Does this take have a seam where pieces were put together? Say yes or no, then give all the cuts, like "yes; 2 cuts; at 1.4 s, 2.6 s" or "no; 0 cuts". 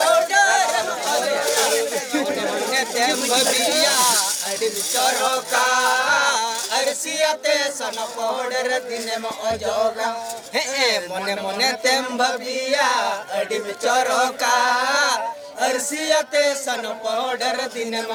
no; 0 cuts